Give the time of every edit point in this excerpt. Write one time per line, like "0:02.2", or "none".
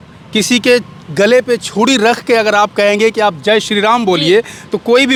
none